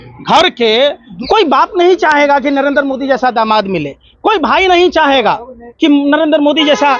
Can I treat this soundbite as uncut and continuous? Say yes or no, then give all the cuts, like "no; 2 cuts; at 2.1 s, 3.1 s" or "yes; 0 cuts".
no; 1 cut; at 1.1 s